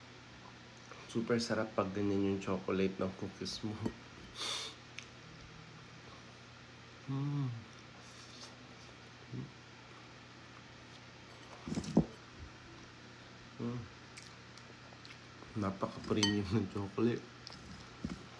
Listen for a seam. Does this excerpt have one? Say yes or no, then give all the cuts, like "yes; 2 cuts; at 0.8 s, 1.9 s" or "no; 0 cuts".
no; 0 cuts